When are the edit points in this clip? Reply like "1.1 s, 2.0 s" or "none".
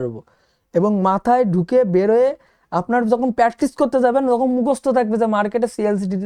none